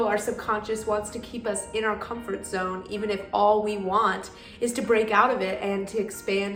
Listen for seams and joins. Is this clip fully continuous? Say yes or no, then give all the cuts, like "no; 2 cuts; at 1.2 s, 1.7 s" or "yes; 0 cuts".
yes; 0 cuts